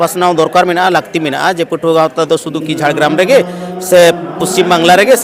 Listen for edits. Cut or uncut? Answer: uncut